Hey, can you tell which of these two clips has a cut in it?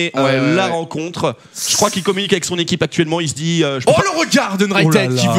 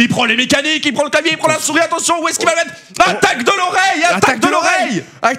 second; 1 cut; at 2.8 s

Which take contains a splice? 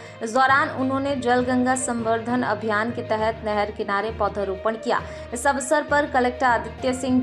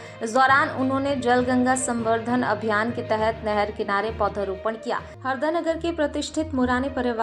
second; 1 cut; at 5.1 s

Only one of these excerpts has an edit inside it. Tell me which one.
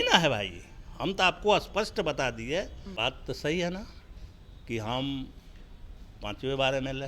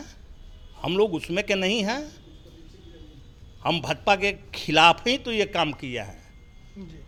first; 1 cut; at 2.8 s

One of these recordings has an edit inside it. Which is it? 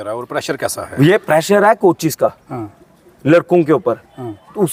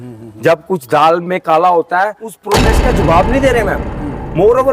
second; 1 cut; at 2.5 s

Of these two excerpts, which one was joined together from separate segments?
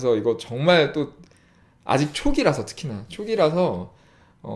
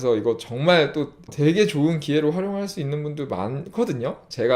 second; 1 cut; at 1.2 s

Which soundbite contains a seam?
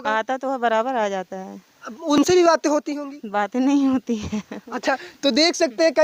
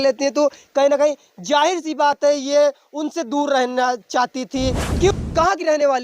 second; 1 cut; at 5.1 s

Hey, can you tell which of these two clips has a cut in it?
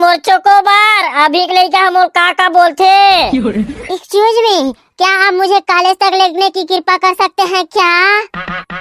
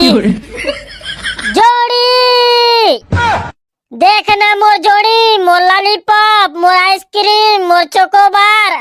first; 1 cut; at 3.8 s

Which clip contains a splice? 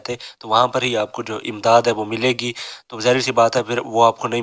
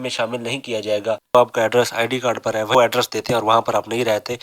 second; 2 cuts; at 1.3 s, 2.7 s

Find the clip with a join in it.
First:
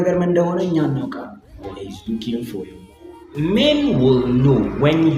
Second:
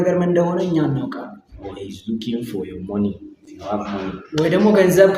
first; 1 cut; at 3.0 s

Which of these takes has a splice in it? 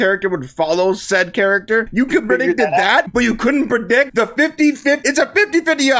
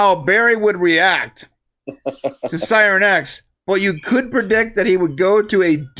first; 4 cuts; at 1.9 s, 3.1 s, 4.1 s, 5.0 s

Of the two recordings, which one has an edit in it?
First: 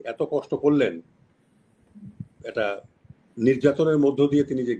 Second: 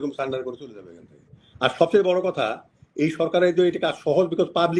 second; 1 cut; at 1.4 s

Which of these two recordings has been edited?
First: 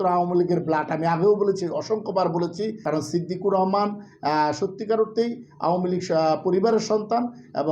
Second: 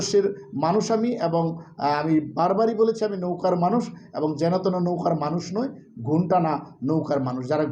first; 1 cut; at 2.8 s

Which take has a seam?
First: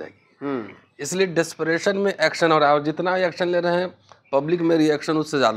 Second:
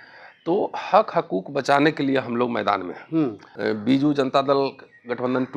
second; 1 cut; at 3.5 s

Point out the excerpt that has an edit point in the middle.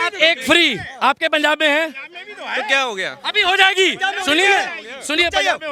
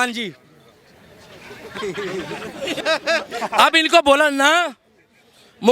second; 1 cut; at 2.8 s

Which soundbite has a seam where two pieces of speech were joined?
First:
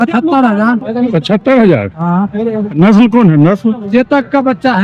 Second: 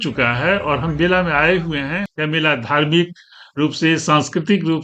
second; 1 cut; at 2.0 s

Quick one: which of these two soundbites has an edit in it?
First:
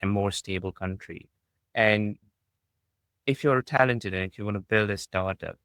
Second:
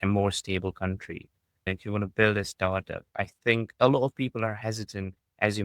second; 2 cuts; at 1.6 s, 3.7 s

